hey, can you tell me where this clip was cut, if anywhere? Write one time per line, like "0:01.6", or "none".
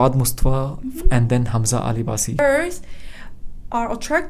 0:02.4

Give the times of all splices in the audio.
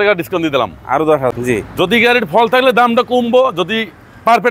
0:01.3

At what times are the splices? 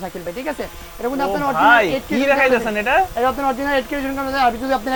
none

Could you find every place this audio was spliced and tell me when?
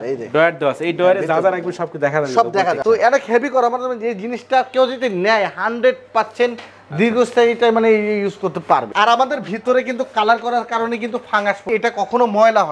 0:02.8
0:08.9
0:11.6

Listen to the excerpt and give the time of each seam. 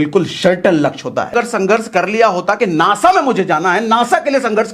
0:01.3

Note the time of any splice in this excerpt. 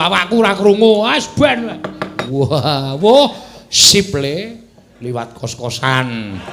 0:02.2

